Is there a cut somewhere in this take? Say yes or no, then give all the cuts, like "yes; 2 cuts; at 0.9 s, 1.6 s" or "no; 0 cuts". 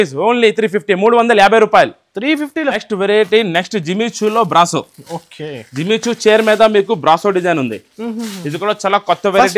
yes; 1 cut; at 2.8 s